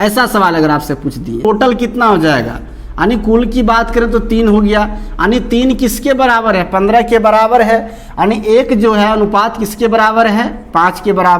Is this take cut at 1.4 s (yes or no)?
yes